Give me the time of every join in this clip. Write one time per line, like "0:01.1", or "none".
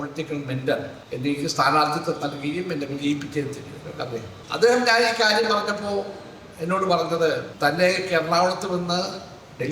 0:01.0
0:04.4
0:07.5